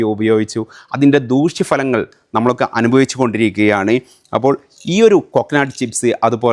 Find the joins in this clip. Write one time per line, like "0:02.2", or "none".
none